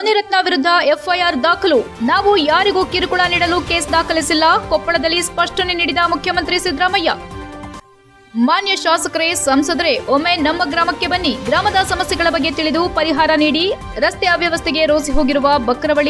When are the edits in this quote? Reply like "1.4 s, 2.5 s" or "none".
none